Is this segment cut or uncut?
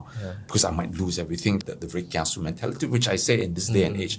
cut